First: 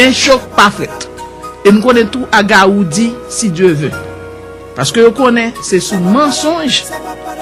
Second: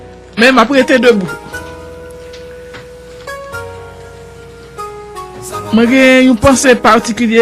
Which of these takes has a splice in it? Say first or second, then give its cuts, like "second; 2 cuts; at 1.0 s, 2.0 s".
second; 1 cut; at 5.2 s